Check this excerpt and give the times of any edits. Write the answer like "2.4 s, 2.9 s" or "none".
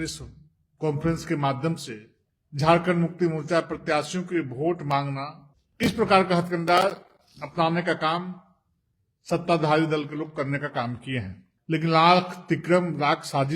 none